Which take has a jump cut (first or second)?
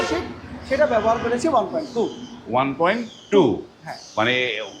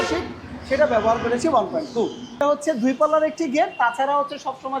second